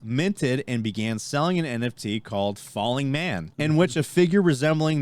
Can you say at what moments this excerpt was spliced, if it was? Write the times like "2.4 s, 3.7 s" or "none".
3.5 s